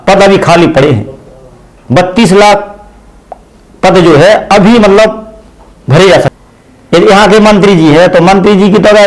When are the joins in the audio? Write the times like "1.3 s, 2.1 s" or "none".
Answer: 6.4 s